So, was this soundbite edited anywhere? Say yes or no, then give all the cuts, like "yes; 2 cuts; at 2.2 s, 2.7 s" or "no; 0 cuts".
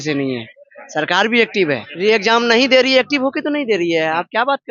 yes; 1 cut; at 1.9 s